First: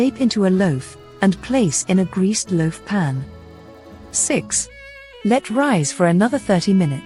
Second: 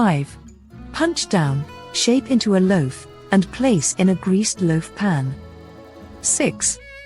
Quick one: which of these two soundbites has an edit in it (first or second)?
second